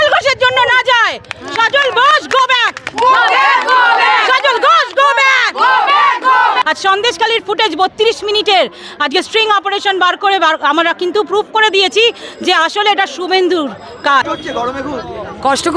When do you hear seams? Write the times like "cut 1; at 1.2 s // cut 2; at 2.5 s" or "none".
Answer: cut 1; at 6.6 s // cut 2; at 14.2 s